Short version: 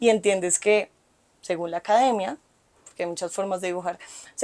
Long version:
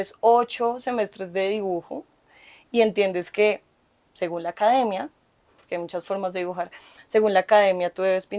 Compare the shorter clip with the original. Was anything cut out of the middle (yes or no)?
no